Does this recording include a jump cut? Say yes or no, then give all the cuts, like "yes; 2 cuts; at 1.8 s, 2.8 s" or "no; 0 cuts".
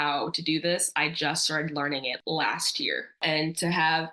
yes; 2 cuts; at 2.2 s, 3.2 s